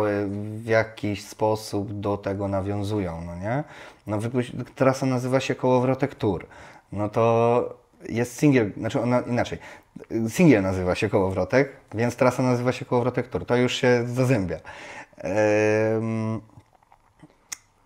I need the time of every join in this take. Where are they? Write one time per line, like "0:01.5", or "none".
none